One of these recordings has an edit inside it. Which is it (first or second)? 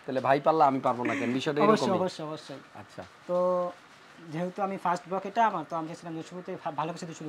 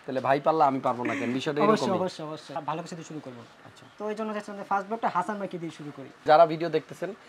second